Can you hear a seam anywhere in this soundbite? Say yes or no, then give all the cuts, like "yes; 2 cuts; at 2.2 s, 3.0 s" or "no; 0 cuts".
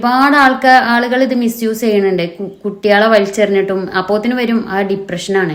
no; 0 cuts